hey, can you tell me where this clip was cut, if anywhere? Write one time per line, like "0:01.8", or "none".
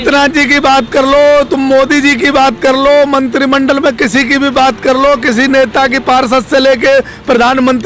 none